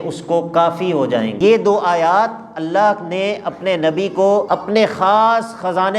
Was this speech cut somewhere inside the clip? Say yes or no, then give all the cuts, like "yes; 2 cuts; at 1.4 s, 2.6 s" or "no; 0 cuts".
yes; 2 cuts; at 1.4 s, 4.5 s